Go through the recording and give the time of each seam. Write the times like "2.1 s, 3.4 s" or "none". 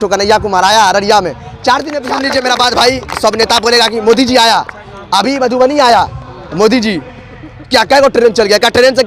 2.1 s

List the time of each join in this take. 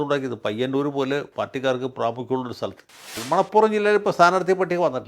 3.2 s

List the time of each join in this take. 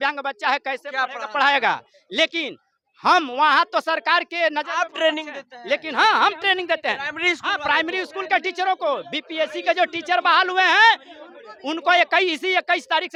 none

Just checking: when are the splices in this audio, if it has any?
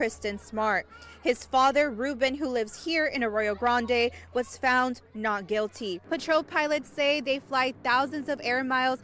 6.0 s

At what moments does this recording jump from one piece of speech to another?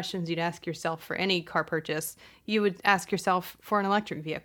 3.6 s

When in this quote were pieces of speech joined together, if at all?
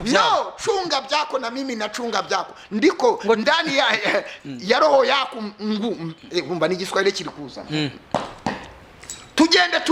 none

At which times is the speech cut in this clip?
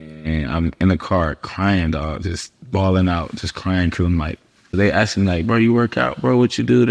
4.7 s

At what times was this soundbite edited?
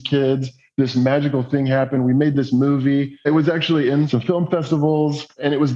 3.2 s, 4.1 s

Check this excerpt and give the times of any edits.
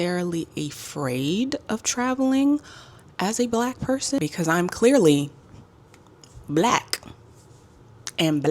4.2 s

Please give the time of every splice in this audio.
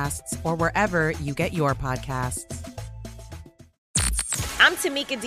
3.8 s

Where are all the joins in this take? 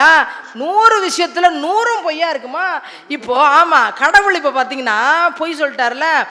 none

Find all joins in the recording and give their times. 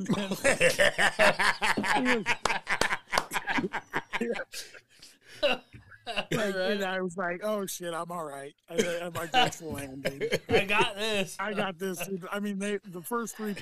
11.4 s

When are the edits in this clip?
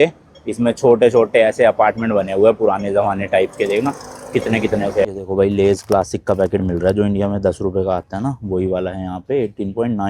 5.0 s

